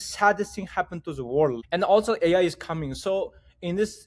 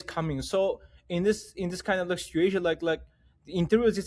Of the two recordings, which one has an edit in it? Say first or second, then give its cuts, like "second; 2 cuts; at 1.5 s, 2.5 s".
first; 1 cut; at 1.6 s